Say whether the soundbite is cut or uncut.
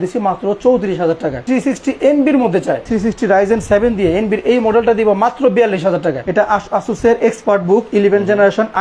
cut